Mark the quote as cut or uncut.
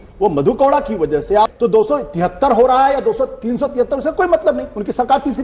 cut